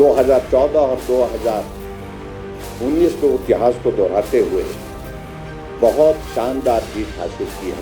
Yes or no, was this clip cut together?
yes